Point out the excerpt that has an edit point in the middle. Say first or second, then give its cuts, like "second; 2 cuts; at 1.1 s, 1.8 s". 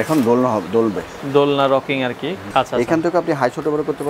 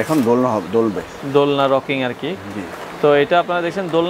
first; 1 cut; at 2.4 s